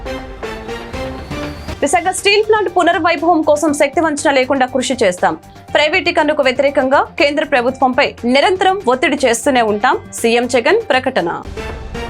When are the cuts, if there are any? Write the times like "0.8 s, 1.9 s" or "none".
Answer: 1.2 s

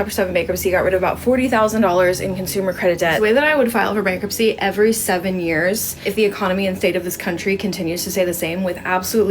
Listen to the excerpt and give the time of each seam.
3.2 s, 5.9 s

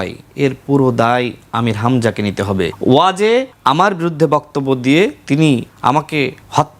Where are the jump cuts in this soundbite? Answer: 2.7 s, 3.5 s, 6.0 s

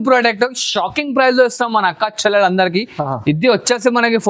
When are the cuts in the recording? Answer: none

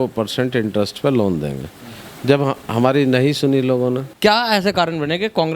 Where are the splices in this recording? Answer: 4.1 s

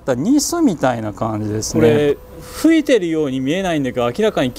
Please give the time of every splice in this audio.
1.7 s

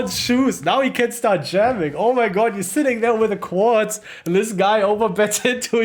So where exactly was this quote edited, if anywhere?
none

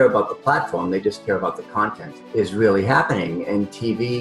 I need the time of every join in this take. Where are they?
2.0 s

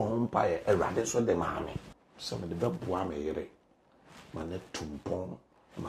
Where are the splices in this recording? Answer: 1.8 s

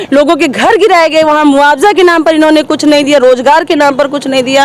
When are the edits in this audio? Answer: none

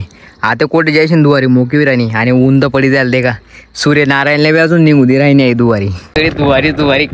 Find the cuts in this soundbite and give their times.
6.2 s

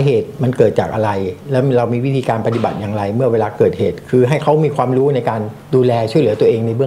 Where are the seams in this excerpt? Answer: 5.5 s

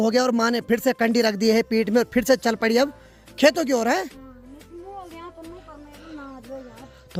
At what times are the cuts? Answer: none

